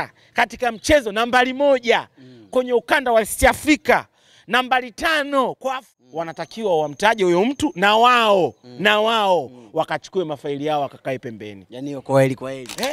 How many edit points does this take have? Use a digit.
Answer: 1